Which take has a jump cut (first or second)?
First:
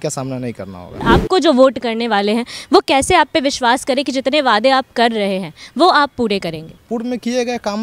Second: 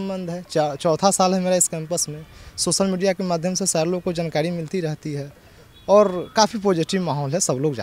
first